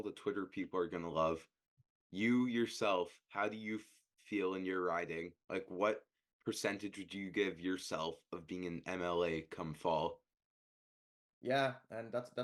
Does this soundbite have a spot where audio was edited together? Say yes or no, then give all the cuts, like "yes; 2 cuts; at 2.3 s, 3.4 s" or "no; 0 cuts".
no; 0 cuts